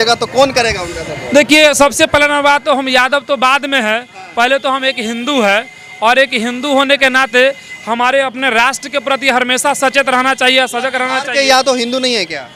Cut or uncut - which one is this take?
uncut